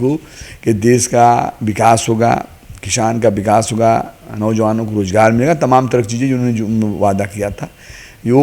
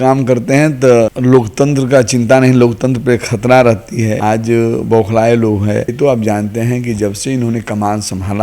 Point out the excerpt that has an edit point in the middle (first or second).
second